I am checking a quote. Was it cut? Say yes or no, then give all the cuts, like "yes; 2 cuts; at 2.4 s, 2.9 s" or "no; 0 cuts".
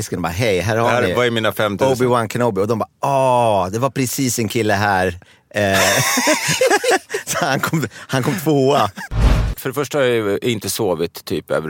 yes; 1 cut; at 9.3 s